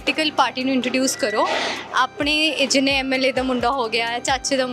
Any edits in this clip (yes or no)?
no